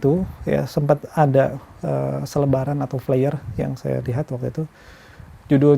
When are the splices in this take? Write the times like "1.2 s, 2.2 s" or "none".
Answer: none